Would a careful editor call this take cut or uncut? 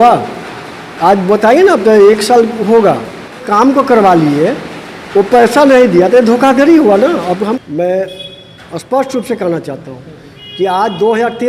cut